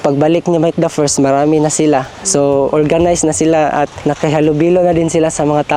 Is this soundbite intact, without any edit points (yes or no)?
yes